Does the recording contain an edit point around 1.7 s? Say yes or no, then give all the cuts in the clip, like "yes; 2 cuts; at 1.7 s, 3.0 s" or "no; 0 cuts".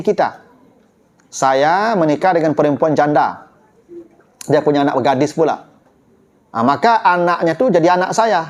no; 0 cuts